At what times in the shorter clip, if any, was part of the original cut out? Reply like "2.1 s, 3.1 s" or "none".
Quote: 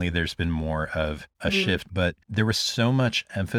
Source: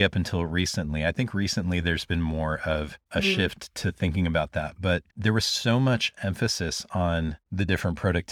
1.9 s